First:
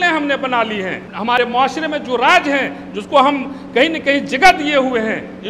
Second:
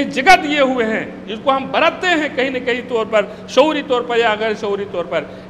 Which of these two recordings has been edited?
first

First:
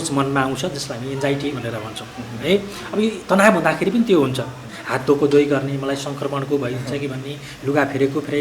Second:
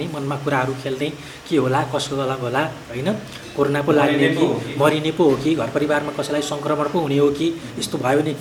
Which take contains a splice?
first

